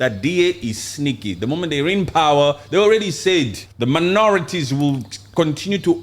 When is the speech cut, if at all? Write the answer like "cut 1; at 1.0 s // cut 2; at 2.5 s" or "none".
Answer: cut 1; at 3.6 s

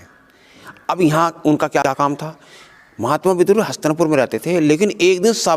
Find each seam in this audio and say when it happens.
cut 1; at 1.8 s

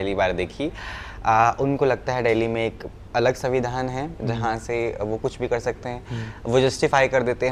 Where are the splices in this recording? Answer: none

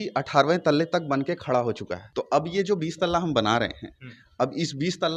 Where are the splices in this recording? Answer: cut 1; at 2.0 s

